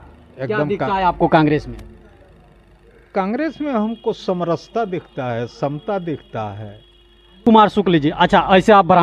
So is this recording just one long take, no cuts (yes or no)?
no